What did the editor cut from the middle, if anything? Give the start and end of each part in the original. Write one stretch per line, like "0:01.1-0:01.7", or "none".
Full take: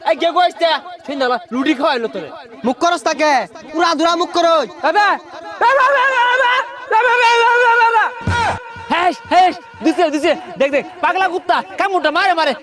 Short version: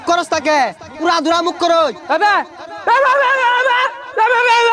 none